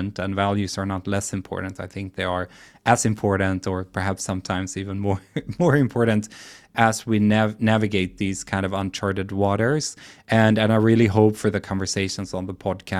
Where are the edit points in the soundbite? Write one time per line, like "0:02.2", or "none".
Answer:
0:06.7